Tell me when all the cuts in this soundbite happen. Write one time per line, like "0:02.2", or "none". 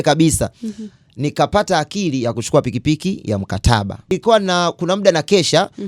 0:04.1